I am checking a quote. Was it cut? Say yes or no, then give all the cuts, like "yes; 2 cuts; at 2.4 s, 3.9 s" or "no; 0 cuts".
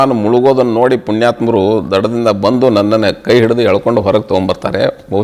no; 0 cuts